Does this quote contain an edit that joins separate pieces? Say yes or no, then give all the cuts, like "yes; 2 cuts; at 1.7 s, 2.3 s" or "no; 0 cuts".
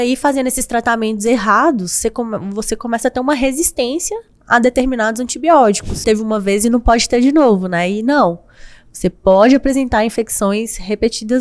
yes; 1 cut; at 6.0 s